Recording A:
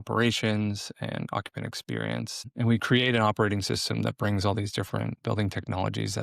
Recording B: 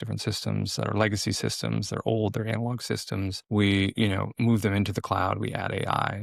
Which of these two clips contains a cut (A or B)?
A